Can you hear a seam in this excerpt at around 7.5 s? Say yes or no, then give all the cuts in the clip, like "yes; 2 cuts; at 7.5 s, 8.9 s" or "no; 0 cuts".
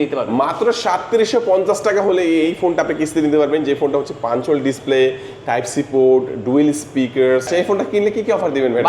yes; 1 cut; at 7.5 s